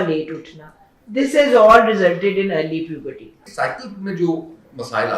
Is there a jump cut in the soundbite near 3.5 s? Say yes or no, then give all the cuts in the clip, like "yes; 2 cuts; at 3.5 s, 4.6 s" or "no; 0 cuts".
yes; 1 cut; at 3.5 s